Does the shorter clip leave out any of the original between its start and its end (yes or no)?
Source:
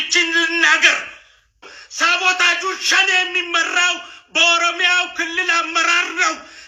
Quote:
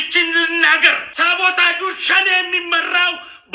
yes